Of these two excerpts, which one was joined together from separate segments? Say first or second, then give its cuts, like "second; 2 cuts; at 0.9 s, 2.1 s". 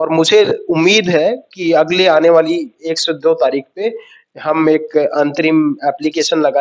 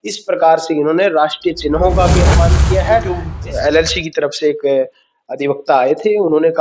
second; 1 cut; at 3.3 s